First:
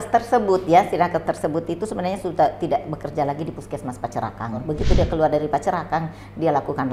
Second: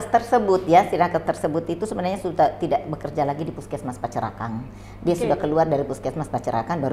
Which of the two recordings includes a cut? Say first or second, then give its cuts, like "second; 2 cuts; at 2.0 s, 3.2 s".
first; 1 cut; at 4.6 s